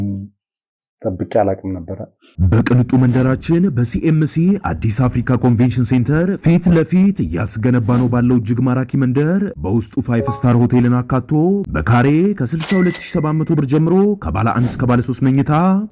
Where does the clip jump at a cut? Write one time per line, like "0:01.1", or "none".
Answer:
0:02.2